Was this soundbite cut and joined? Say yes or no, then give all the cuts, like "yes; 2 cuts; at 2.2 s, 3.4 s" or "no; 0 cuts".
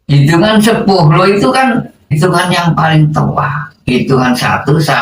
yes; 1 cut; at 2.1 s